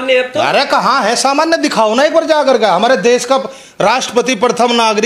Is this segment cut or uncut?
uncut